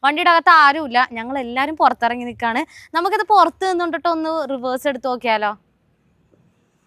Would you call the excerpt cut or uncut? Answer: uncut